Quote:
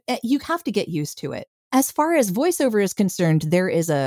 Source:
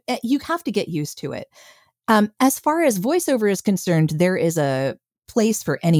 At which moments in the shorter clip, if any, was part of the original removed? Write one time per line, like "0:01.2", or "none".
0:01.7